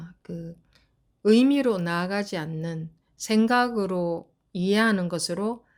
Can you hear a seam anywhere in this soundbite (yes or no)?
no